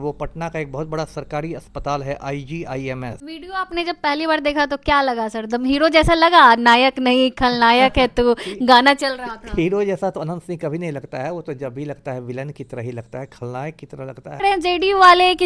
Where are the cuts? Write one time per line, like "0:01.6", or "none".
0:03.2
0:14.4